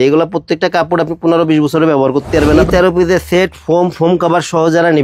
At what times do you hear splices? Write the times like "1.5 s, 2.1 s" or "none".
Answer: 2.4 s